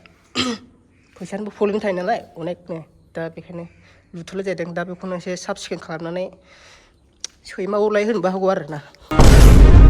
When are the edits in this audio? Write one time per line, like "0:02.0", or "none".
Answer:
0:09.0